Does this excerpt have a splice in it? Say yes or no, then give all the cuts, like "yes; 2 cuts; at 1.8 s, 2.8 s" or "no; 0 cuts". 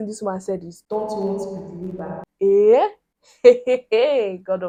no; 0 cuts